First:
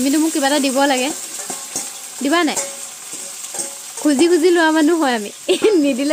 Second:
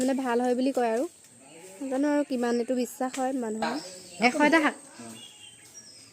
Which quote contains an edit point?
second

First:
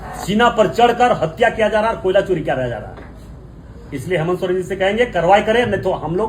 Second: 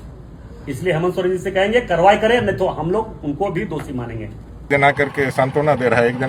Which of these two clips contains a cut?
second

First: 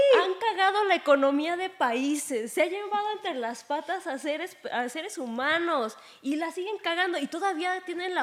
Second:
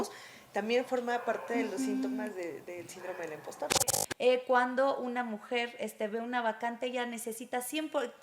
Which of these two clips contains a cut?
second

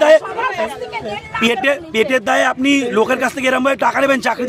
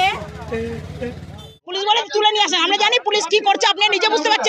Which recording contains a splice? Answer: second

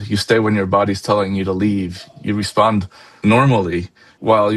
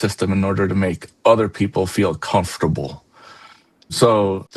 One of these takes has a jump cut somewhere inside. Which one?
first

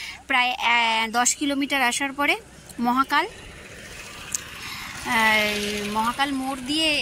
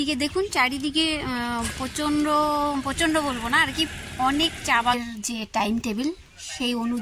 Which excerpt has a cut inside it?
second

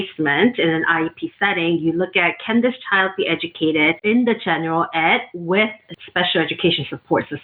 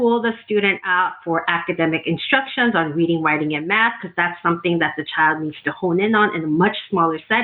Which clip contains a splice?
first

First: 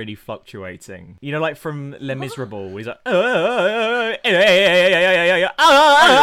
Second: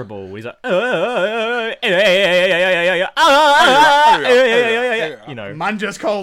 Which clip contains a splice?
first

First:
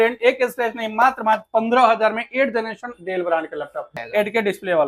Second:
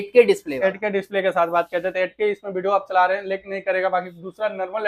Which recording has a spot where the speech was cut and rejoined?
first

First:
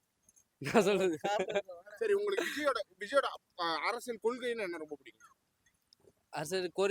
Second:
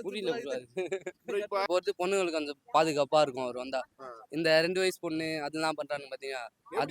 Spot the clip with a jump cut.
second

